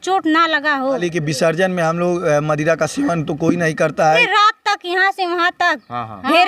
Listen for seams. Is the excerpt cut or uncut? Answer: cut